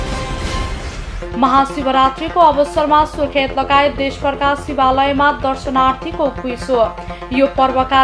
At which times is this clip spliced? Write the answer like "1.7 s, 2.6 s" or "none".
1.0 s